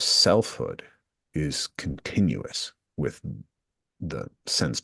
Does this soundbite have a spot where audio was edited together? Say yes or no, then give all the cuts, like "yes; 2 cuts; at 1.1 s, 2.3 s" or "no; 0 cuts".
no; 0 cuts